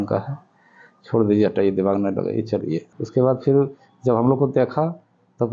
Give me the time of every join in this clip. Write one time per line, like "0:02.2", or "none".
0:02.9